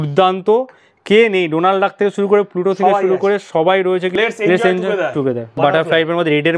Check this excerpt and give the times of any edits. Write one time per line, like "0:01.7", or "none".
0:04.1
0:05.6